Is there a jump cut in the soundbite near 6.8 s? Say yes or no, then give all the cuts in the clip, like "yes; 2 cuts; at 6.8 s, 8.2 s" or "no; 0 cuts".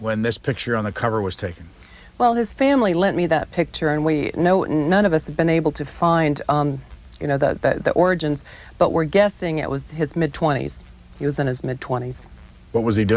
no; 1 cut; at 8.4 s